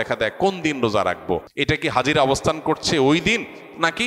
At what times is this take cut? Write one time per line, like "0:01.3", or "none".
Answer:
0:01.5